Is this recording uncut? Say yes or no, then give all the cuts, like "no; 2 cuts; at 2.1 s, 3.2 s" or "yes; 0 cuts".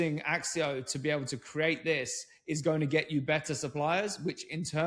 yes; 0 cuts